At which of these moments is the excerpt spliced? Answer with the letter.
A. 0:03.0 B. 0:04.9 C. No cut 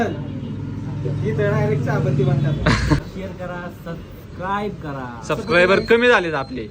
A